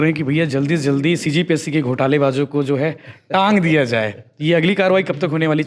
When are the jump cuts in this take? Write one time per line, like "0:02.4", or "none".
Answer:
none